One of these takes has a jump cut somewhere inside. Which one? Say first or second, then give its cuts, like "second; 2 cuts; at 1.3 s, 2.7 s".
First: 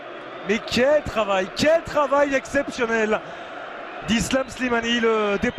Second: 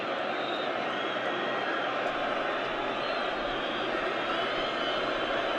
first; 1 cut; at 2.9 s